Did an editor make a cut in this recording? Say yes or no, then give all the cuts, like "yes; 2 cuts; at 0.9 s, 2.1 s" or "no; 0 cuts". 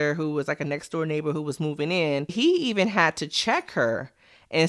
yes; 1 cut; at 2.3 s